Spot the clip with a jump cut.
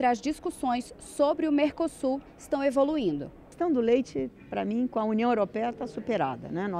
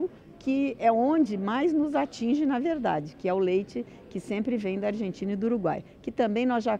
first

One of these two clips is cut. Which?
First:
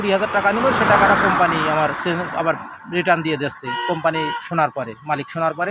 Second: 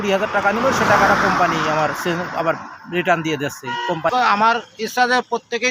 second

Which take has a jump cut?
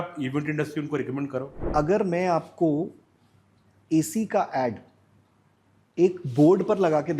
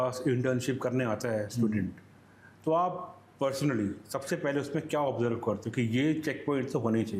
first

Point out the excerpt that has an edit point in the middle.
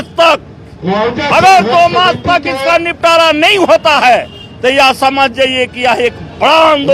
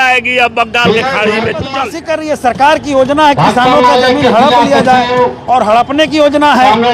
second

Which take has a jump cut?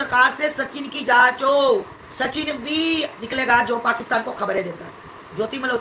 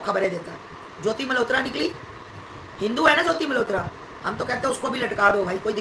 first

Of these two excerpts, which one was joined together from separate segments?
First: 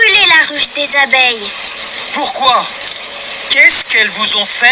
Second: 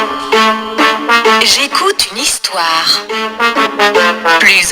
second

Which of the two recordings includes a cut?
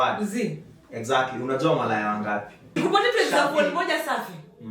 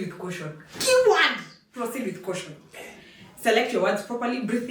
first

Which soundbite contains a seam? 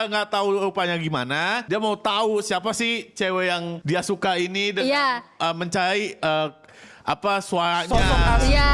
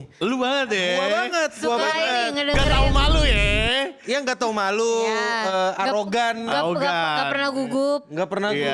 first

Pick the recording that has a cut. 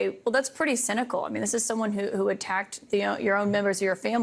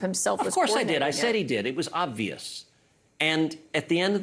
second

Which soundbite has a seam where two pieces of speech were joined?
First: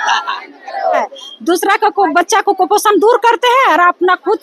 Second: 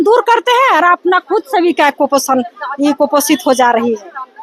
first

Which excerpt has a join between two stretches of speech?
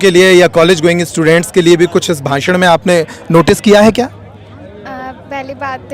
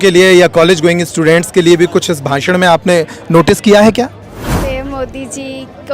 second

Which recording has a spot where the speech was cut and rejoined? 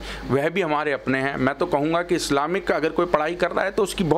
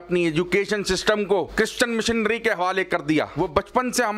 second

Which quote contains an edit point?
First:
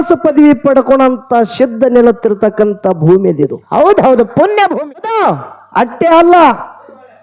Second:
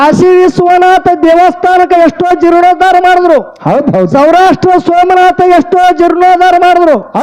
first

